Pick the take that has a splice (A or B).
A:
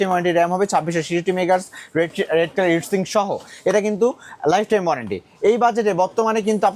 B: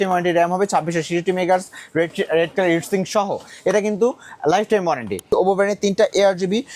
B